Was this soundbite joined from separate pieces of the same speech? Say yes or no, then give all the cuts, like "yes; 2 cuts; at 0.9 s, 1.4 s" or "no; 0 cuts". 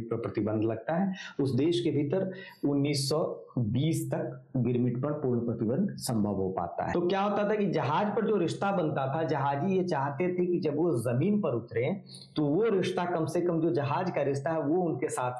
yes; 1 cut; at 6.9 s